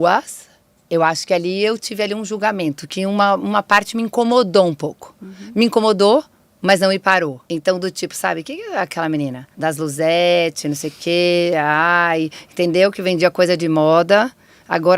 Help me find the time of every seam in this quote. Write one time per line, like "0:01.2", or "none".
0:07.4
0:09.5